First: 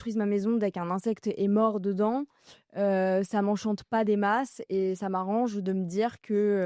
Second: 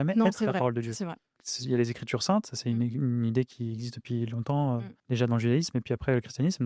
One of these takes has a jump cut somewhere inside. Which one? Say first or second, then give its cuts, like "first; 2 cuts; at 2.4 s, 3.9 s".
second; 2 cuts; at 1.4 s, 4.9 s